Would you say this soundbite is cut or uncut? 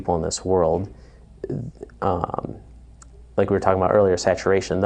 uncut